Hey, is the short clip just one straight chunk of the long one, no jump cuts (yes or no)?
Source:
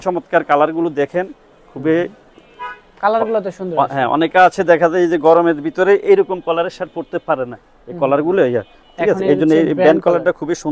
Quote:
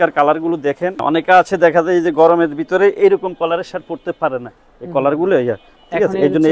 no